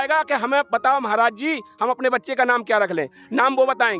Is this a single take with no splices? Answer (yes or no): yes